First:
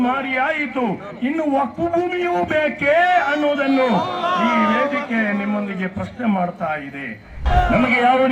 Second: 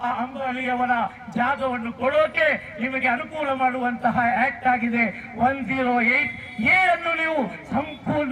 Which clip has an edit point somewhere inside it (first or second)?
first